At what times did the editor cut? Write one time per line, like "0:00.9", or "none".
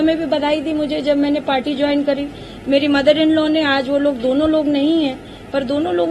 none